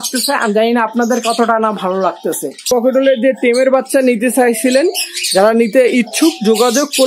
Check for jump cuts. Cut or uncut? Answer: cut